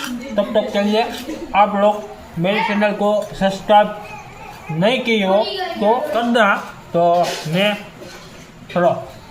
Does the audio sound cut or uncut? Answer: cut